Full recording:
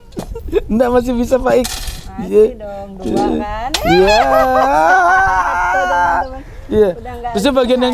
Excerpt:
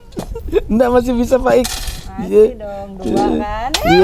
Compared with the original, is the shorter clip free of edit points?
yes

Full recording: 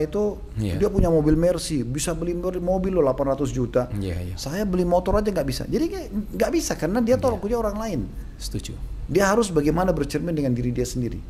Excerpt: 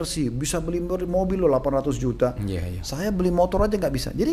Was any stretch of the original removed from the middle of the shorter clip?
no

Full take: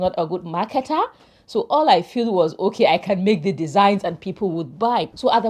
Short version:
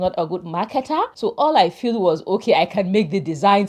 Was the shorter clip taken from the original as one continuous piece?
no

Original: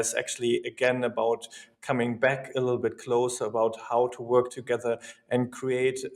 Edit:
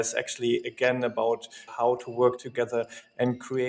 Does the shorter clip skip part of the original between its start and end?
yes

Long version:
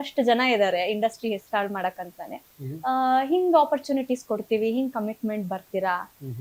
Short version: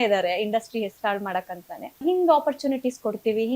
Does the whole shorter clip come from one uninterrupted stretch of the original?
no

